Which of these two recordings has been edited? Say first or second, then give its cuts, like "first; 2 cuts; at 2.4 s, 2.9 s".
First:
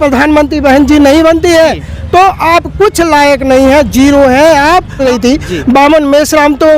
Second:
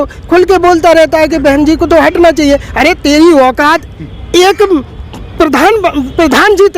first; 1 cut; at 5.0 s